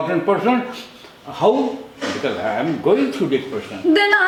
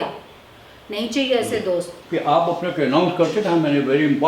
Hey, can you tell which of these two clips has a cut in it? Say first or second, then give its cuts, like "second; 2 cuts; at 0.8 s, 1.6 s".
second; 1 cut; at 2.0 s